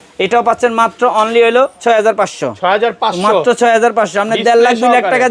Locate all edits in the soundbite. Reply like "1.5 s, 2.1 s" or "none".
none